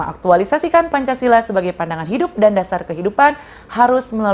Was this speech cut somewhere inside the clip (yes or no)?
no